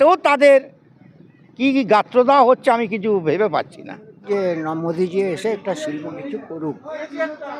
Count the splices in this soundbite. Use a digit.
1